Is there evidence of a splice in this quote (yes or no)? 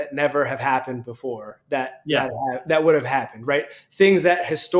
no